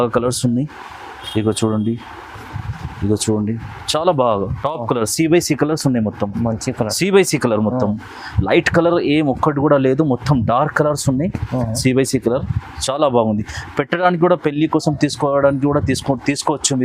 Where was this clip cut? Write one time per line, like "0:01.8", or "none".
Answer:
none